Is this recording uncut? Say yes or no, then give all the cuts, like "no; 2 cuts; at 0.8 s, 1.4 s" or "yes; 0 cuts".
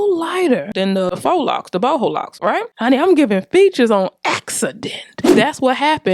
no; 2 cuts; at 1.2 s, 2.7 s